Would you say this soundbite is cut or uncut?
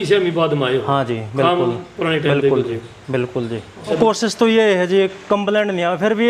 cut